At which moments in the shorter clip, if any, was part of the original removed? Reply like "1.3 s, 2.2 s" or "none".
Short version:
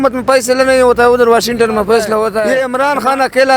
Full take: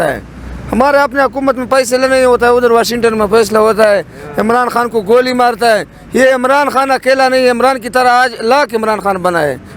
2.4 s